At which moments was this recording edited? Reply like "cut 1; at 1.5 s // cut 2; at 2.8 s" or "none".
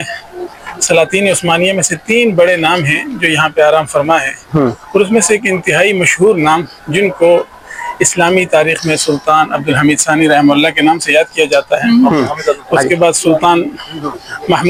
none